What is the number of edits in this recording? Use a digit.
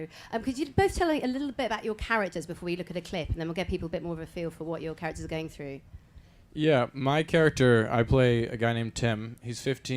0